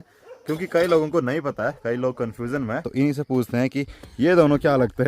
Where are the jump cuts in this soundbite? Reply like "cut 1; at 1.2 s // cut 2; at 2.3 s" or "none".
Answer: cut 1; at 2.8 s